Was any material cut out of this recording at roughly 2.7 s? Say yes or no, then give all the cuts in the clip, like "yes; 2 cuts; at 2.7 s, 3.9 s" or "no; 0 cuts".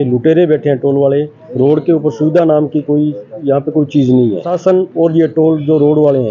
no; 2 cuts; at 1.4 s, 4.5 s